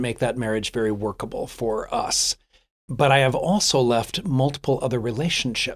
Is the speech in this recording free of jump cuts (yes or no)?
yes